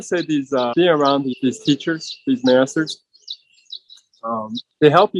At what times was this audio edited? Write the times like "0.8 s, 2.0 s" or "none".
0.7 s, 1.3 s